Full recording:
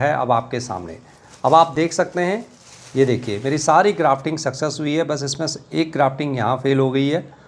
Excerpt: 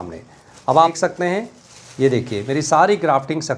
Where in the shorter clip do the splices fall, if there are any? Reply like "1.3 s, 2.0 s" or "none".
0.9 s